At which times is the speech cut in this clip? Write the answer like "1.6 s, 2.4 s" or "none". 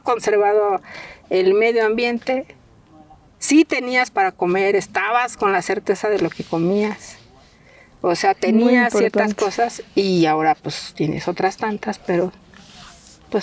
none